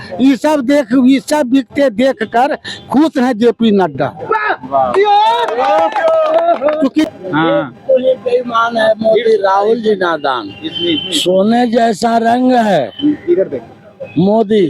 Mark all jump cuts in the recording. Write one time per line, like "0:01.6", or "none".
0:07.1